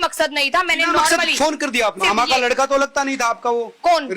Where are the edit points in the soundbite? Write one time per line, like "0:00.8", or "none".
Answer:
0:02.0